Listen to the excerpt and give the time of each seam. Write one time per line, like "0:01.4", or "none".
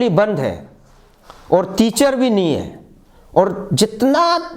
none